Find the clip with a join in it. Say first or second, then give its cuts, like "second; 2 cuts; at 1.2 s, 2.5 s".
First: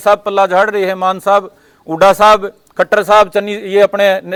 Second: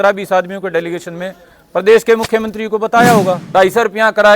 second; 1 cut; at 3.4 s